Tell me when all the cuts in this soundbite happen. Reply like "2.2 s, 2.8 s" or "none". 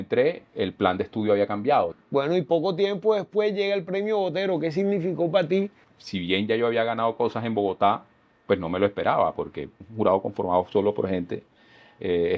2.0 s, 5.8 s, 9.8 s